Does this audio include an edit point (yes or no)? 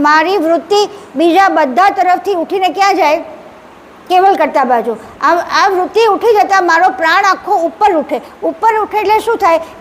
no